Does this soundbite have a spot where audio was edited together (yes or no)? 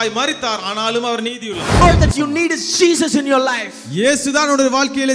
yes